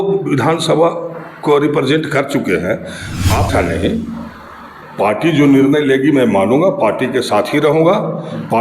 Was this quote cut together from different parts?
yes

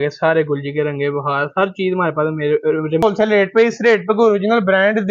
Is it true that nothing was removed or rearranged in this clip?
no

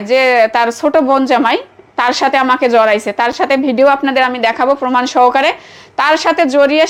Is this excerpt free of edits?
yes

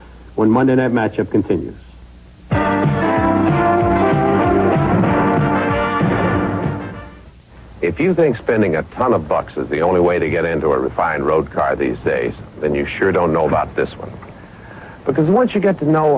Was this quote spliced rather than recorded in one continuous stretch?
yes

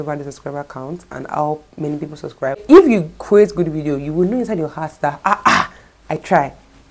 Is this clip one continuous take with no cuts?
no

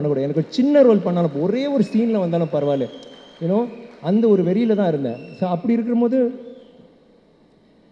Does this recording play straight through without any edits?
yes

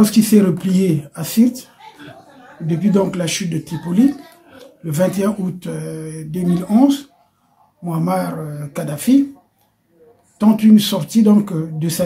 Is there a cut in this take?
no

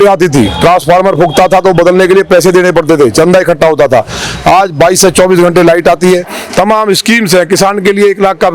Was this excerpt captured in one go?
no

